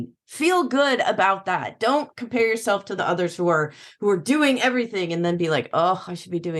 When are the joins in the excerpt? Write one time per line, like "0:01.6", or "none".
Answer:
none